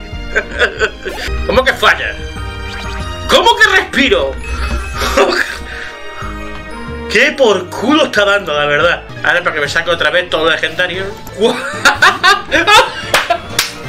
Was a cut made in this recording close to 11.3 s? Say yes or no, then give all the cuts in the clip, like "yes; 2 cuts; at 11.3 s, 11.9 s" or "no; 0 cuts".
yes; 3 cuts; at 1.3 s, 9.1 s, 11.3 s